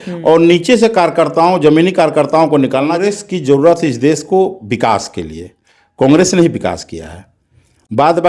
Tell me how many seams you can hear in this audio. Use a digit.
1